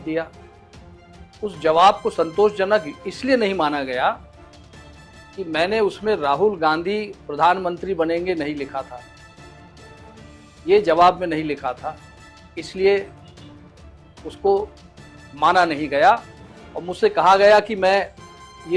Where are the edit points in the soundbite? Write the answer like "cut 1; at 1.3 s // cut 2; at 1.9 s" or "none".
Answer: cut 1; at 9.0 s // cut 2; at 10.6 s